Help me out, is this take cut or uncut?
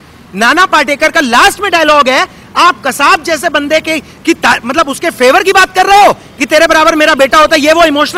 uncut